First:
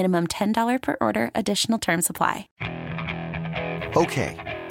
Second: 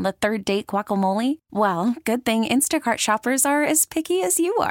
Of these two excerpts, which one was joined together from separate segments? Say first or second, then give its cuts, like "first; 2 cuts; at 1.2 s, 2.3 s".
first; 1 cut; at 2.4 s